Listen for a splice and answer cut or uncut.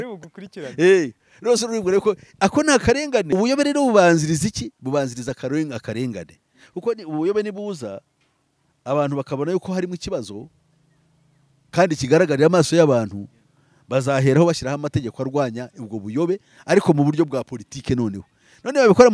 cut